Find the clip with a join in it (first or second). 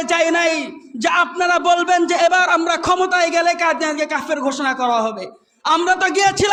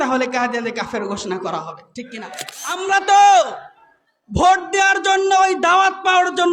second